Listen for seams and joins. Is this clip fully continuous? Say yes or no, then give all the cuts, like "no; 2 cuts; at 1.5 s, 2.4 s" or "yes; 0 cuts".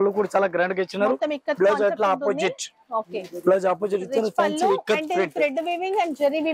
yes; 0 cuts